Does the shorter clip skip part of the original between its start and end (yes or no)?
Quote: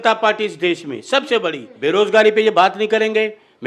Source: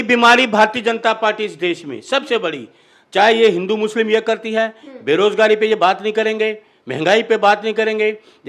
yes